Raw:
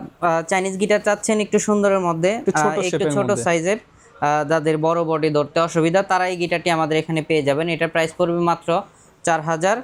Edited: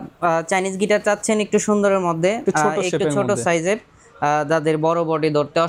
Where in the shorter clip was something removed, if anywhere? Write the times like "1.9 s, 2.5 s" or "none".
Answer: none